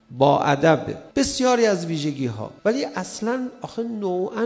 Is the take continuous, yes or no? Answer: no